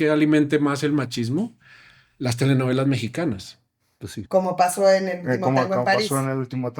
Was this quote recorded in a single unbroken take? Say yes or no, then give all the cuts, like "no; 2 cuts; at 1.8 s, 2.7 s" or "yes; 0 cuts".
no; 1 cut; at 4.2 s